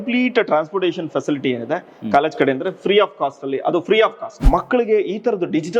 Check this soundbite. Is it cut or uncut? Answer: cut